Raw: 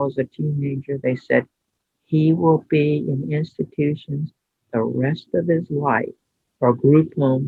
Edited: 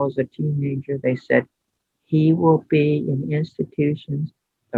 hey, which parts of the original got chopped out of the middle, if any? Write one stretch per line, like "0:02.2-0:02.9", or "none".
none